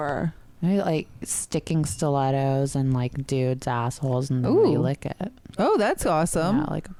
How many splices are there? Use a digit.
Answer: 0